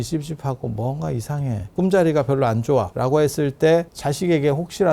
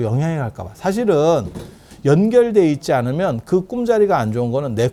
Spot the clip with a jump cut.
first; 3 cuts; at 1.7 s, 2.9 s, 4.0 s

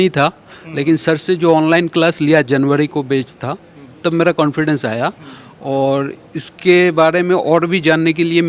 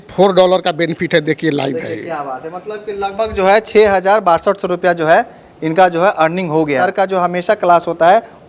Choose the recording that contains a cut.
second; 1 cut; at 6.9 s

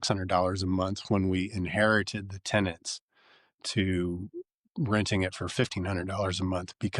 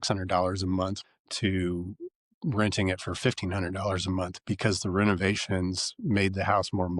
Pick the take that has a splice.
second; 1 cut; at 1.0 s

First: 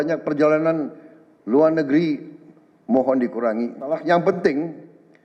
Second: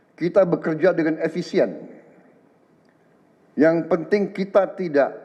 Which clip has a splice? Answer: first; 1 cut; at 4.0 s

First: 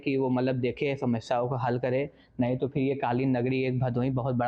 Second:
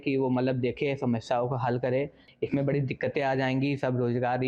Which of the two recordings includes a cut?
second; 1 cut; at 2.2 s

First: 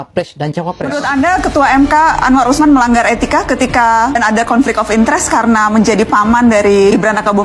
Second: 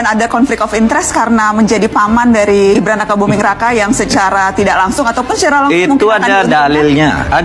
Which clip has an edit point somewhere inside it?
first; 1 cut; at 0.9 s

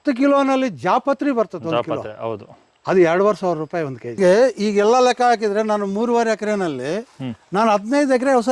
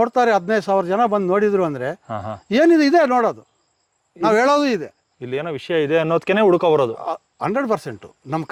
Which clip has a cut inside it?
first; 1 cut; at 4.2 s

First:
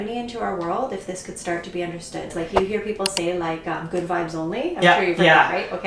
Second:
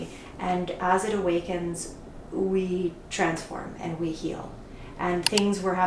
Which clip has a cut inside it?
first; 1 cut; at 2.3 s

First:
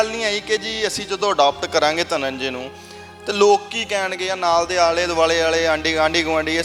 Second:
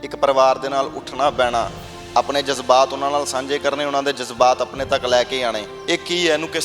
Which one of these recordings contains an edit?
second; 1 cut; at 5.7 s

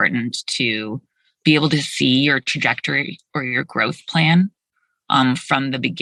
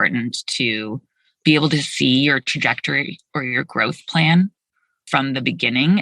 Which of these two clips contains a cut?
second; 1 cut; at 5.0 s

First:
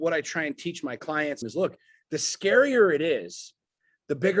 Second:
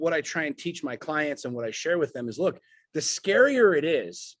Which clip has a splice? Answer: first; 1 cut; at 1.4 s

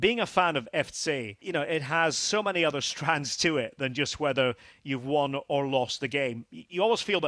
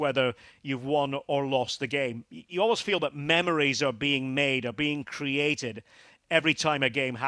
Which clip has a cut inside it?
first; 1 cut; at 1.3 s

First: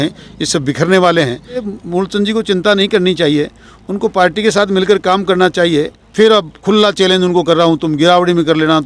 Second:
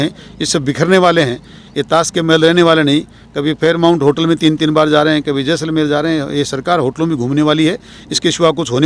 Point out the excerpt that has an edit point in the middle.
first; 2 cuts; at 1.7 s, 6.0 s

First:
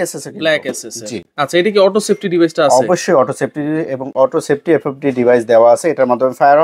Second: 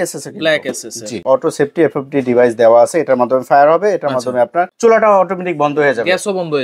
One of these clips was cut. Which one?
second; 2 cuts; at 1.1 s, 4.7 s

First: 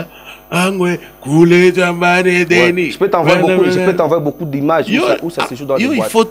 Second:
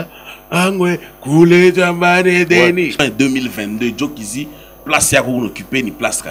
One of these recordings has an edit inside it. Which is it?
second; 1 cut; at 3.0 s

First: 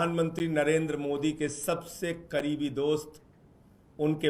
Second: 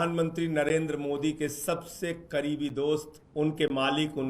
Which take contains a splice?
second; 1 cut; at 3.2 s

